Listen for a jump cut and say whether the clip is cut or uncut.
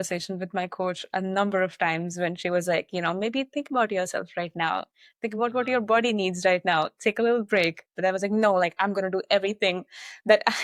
uncut